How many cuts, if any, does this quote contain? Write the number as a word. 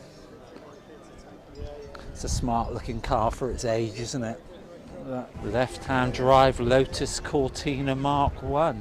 one